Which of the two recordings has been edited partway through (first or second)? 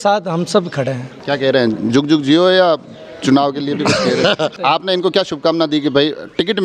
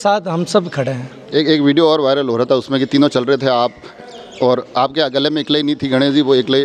first